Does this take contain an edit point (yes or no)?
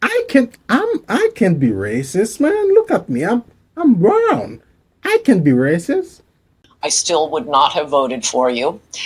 yes